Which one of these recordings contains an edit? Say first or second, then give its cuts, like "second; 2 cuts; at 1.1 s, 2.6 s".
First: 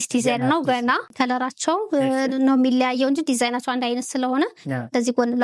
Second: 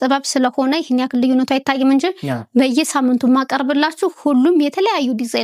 first; 1 cut; at 1.1 s